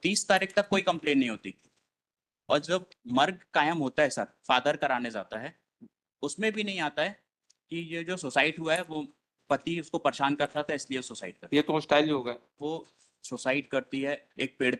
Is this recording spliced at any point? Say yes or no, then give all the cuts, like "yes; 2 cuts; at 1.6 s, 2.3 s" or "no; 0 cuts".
yes; 1 cut; at 12.6 s